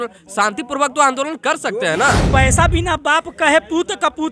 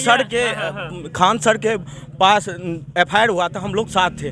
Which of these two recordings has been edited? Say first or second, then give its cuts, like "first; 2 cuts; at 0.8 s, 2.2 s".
first; 1 cut; at 2.2 s